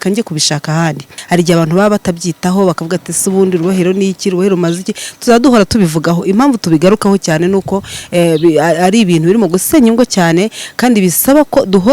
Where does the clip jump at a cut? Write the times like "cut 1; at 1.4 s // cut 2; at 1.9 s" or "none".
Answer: cut 1; at 1.1 s

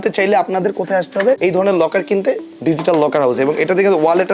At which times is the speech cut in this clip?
cut 1; at 1.4 s

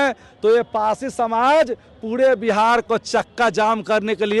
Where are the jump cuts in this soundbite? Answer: none

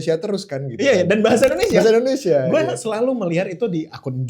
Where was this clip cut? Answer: none

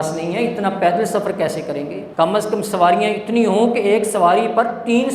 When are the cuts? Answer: cut 1; at 2.0 s

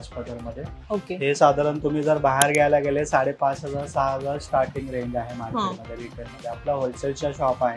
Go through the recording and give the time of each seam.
none

